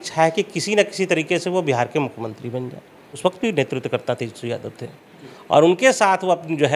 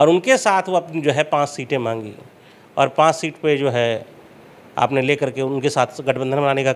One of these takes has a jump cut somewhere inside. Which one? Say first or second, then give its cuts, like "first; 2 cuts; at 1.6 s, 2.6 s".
first; 1 cut; at 3.1 s